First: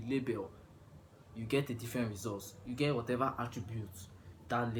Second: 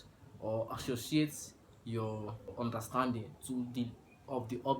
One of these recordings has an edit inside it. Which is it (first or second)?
second